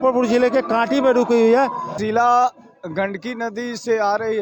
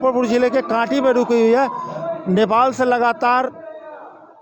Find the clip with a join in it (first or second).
first